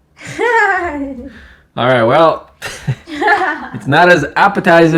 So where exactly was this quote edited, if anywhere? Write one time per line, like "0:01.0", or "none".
none